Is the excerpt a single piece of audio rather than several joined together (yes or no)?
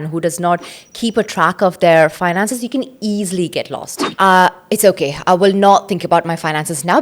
no